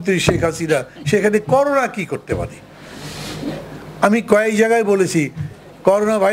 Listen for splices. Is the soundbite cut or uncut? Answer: uncut